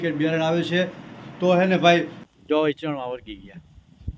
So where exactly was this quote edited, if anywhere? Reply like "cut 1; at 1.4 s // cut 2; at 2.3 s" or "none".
cut 1; at 2.2 s